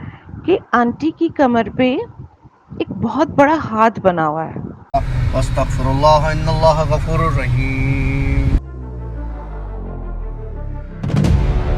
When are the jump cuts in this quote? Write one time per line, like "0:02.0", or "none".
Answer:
0:04.8